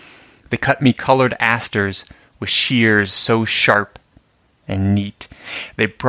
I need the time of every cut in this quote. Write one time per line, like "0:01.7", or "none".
none